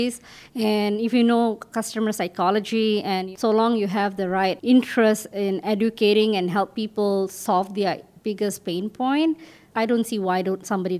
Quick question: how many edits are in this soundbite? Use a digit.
3